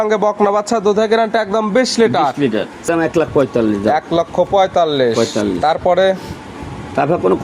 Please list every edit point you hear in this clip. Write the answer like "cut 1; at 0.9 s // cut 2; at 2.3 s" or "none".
cut 1; at 2.8 s